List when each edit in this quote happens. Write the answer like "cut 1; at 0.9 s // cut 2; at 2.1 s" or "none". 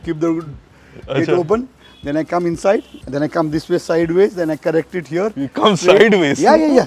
cut 1; at 3.0 s